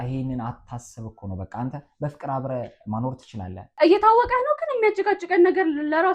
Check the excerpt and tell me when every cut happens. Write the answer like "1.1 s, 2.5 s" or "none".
3.7 s